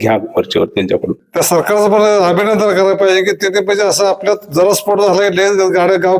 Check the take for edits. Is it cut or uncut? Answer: cut